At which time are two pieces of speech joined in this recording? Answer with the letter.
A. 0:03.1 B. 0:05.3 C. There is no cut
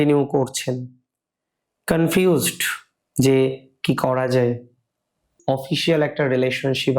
B